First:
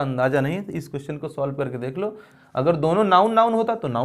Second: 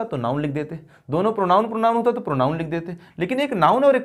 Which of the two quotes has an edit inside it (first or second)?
first